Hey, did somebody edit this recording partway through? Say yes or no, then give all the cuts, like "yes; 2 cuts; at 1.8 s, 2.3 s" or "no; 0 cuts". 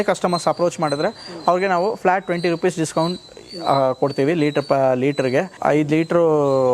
yes; 1 cut; at 5.6 s